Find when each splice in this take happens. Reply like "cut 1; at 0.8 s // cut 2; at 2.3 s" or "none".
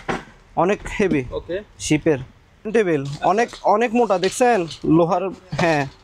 cut 1; at 2.7 s